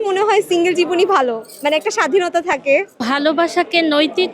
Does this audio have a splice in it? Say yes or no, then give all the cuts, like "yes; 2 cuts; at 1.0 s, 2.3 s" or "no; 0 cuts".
yes; 1 cut; at 2.9 s